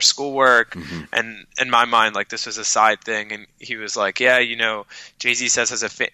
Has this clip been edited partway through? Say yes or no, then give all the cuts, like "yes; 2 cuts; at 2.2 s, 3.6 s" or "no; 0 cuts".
no; 0 cuts